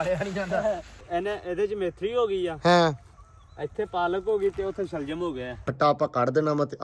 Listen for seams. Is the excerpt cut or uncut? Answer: cut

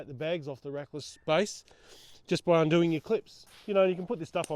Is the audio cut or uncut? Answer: cut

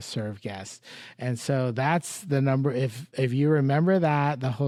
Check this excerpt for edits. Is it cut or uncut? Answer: uncut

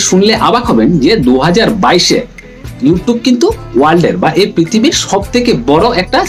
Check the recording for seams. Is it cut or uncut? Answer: uncut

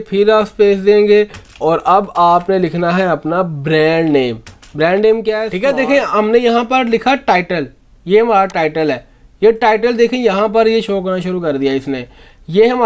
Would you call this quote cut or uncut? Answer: cut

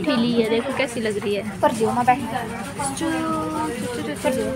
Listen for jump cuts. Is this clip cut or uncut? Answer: uncut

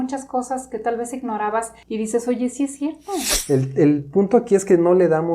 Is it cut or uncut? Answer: cut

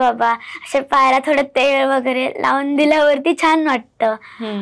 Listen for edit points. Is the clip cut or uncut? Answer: uncut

